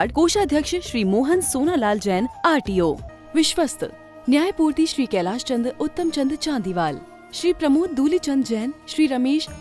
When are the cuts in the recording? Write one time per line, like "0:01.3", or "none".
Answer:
0:03.1